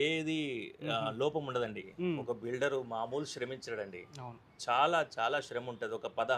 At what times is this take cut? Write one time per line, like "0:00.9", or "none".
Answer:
0:01.9